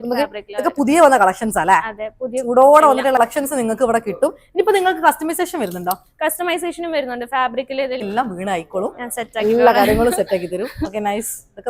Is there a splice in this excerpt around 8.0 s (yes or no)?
yes